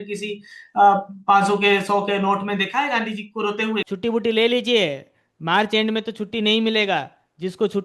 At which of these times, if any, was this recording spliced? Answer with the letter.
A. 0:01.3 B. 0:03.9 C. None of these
B